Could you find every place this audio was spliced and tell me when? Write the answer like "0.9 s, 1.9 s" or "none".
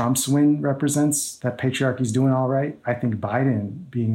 1.3 s